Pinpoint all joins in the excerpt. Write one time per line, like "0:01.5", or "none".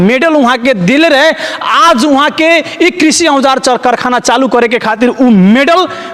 none